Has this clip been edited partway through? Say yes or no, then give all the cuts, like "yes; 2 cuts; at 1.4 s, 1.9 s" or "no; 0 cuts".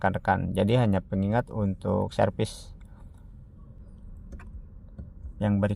yes; 1 cut; at 3.8 s